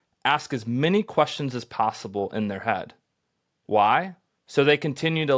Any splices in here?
no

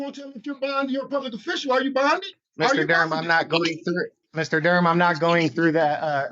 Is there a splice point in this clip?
yes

